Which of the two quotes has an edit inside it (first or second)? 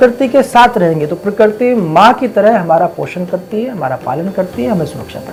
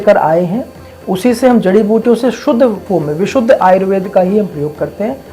second